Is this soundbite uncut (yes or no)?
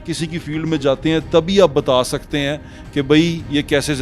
yes